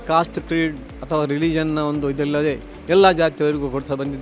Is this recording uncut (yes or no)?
yes